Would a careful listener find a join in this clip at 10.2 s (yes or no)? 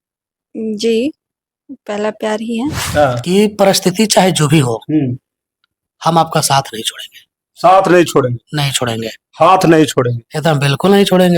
no